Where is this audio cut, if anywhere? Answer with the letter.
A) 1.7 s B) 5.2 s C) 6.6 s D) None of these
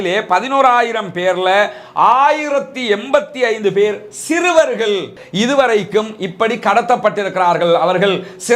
B